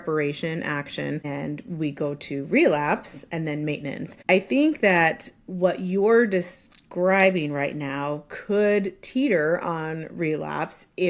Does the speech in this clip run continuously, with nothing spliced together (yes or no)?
no